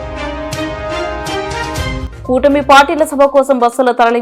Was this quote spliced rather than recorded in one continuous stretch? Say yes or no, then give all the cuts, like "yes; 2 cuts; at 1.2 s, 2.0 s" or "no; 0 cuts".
yes; 1 cut; at 2.0 s